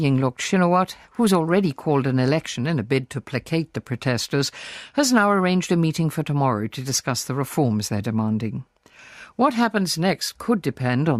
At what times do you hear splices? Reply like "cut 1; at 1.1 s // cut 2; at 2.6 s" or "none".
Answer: cut 1; at 5.3 s